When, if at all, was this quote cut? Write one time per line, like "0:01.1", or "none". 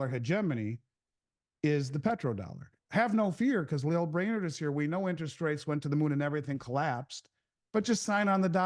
0:02.7